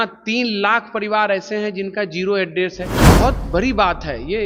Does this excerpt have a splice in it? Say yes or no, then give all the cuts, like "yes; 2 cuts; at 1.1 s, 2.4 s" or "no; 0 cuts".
yes; 1 cut; at 3.1 s